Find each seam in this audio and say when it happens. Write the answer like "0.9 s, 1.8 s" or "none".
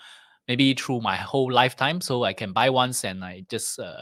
none